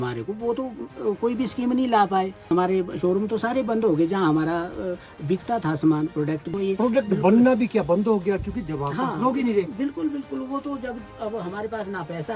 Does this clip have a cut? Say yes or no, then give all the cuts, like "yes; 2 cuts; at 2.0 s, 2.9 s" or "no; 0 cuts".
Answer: yes; 2 cuts; at 2.5 s, 6.5 s